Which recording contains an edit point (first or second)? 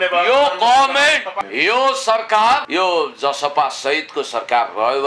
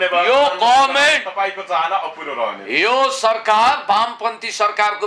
first